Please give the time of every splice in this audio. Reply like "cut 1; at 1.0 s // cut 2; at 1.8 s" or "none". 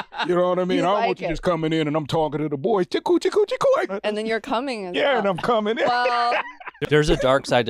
cut 1; at 3.9 s // cut 2; at 6.8 s